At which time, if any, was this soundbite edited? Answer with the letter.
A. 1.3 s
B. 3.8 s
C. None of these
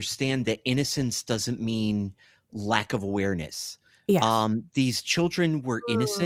C